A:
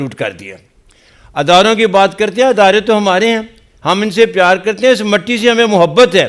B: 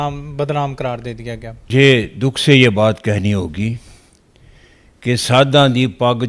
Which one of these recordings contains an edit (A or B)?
B